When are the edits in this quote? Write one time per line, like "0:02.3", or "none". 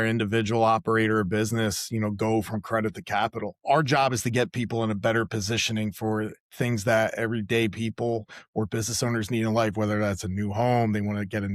0:03.5